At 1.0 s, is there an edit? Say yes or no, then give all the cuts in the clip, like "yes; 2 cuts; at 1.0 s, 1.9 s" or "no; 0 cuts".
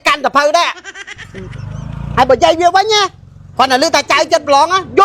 yes; 1 cut; at 1.0 s